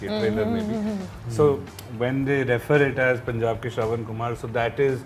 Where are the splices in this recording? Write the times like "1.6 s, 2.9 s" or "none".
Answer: none